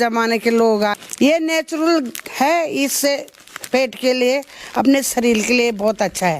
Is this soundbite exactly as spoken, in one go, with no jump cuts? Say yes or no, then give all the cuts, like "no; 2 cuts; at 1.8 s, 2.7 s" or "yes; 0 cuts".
no; 1 cut; at 0.9 s